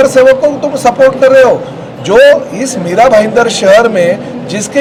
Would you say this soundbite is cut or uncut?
uncut